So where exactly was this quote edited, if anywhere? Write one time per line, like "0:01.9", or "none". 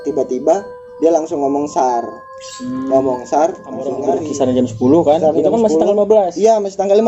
0:04.0